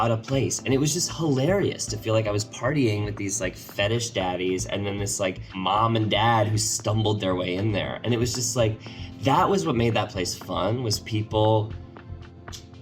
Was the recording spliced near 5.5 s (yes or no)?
yes